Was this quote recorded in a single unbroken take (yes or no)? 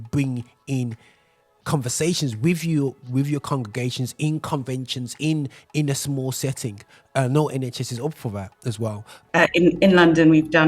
no